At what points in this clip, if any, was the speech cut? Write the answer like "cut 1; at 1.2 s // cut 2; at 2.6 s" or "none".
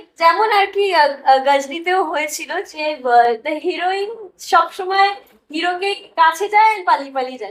none